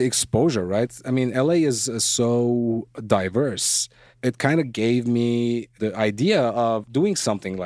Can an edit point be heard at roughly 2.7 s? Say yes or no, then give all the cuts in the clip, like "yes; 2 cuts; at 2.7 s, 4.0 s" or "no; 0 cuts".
no; 4 cuts; at 0.9 s, 4.1 s, 5.8 s, 6.9 s